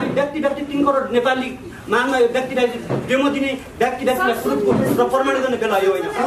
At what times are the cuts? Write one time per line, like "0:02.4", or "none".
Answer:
none